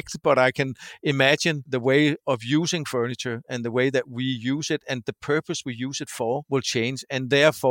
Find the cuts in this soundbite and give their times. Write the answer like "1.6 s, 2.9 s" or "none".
1.6 s, 6.4 s